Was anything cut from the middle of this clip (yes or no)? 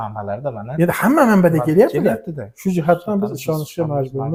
no